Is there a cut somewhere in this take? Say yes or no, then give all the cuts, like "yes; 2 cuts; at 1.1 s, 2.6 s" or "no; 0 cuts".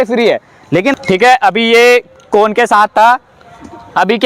yes; 1 cut; at 0.9 s